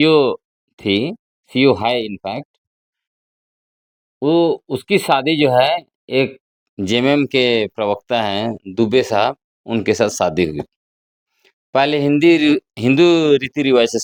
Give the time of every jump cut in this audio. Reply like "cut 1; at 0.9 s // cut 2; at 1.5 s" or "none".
none